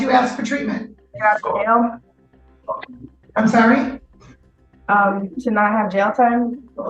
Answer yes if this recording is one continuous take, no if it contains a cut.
no